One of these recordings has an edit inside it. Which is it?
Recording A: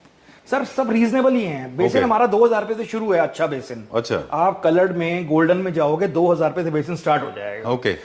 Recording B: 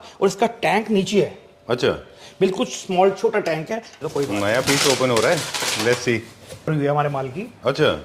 B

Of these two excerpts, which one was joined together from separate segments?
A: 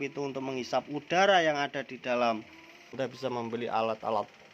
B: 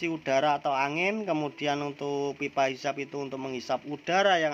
A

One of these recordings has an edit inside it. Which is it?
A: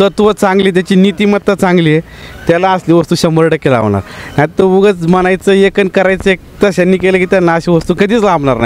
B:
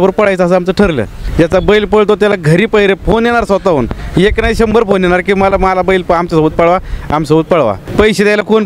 B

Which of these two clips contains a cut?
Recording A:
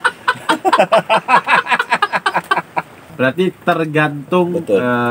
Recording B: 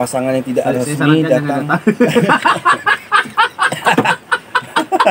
A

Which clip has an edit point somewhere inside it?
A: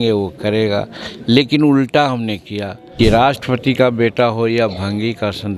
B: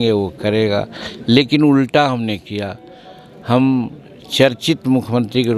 A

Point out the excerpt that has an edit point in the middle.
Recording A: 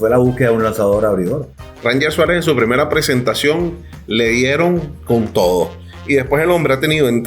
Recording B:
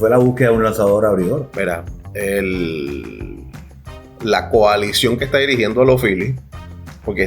A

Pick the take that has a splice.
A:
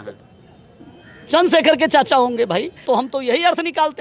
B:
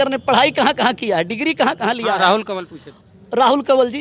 A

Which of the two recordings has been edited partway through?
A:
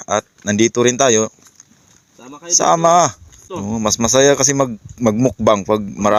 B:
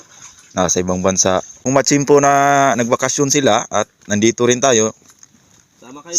B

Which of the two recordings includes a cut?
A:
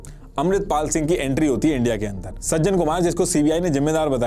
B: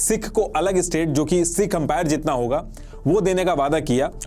A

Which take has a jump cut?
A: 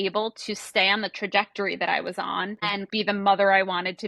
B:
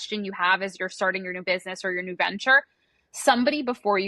A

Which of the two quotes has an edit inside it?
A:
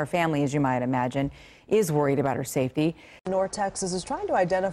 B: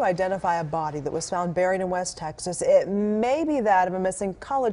A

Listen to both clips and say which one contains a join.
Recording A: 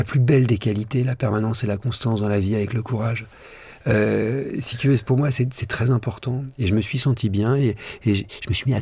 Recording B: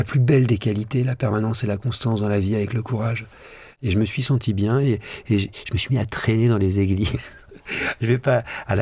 B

